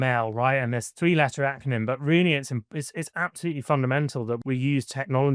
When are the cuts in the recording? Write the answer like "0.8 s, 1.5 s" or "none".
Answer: 4.4 s